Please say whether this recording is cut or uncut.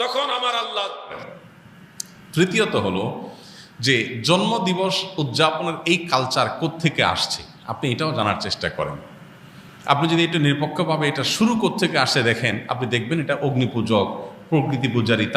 cut